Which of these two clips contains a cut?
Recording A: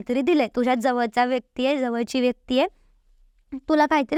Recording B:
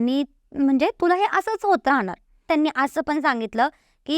B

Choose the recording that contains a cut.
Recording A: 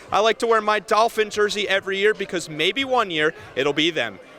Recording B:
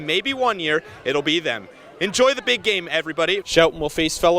B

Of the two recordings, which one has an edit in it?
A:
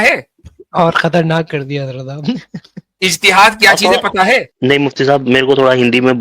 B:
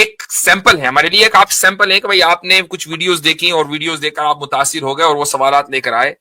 A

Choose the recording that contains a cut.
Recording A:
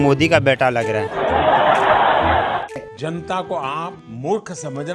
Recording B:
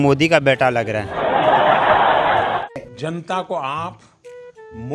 A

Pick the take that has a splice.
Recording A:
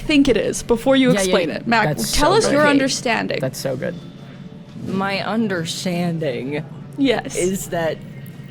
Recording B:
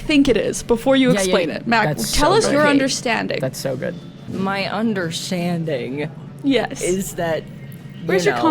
B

